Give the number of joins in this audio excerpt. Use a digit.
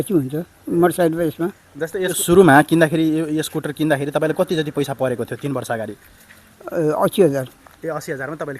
1